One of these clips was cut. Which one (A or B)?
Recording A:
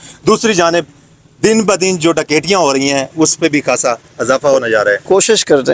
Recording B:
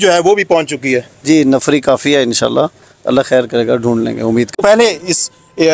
B